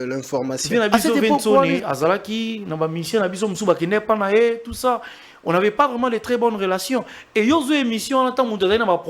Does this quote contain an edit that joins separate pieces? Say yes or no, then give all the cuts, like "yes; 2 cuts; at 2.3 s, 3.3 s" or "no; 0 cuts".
yes; 1 cut; at 1.7 s